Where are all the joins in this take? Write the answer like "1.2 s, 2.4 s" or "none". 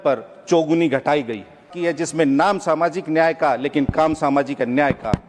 1.7 s